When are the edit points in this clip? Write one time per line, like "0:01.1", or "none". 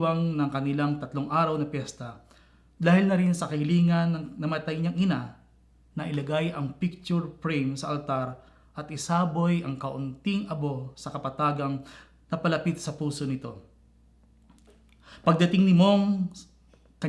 0:05.9